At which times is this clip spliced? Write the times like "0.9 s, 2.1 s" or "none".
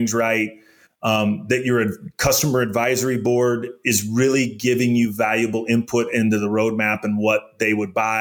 none